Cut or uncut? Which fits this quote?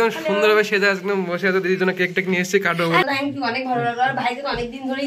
cut